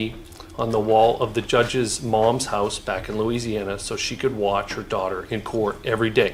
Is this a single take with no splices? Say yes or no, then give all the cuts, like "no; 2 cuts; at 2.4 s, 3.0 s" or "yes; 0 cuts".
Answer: yes; 0 cuts